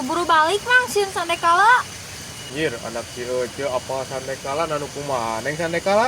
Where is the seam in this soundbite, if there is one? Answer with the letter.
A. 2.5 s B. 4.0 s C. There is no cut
A